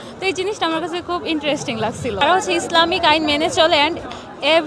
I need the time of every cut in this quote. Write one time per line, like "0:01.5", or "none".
0:02.2